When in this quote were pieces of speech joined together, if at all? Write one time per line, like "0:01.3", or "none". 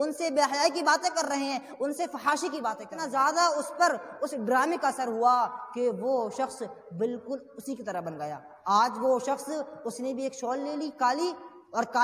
0:03.0